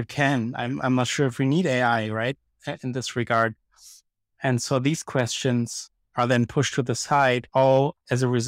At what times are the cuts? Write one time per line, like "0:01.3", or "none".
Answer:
0:07.4